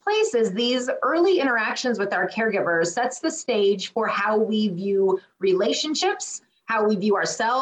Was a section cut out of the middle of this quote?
no; 0 cuts

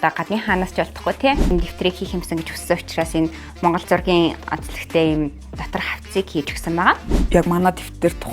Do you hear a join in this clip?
yes; 2 cuts; at 1.5 s, 7.1 s

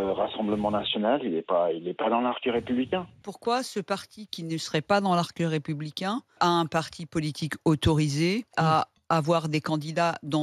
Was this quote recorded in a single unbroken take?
no; 3 cuts; at 3.2 s, 6.4 s, 8.5 s

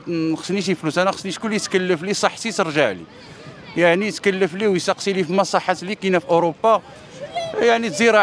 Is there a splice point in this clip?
no; 0 cuts

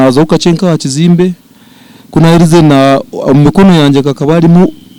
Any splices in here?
no; 0 cuts

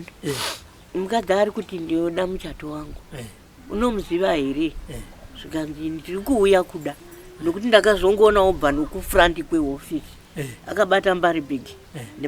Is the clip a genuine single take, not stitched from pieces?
yes; 0 cuts

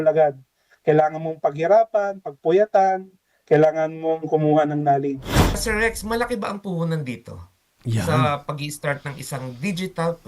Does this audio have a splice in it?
yes; 1 cut; at 5.6 s

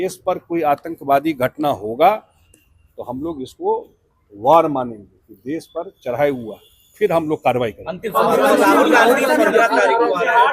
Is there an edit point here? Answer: no; 0 cuts

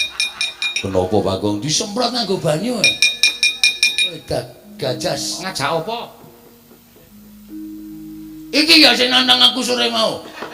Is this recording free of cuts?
no; 1 cut; at 5.4 s

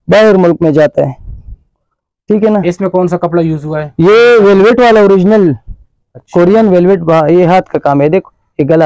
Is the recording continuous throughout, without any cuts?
yes; 0 cuts

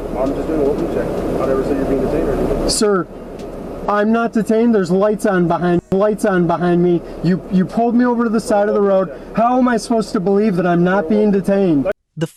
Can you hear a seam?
no; 0 cuts

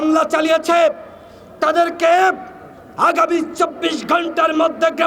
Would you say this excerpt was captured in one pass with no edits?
yes; 0 cuts

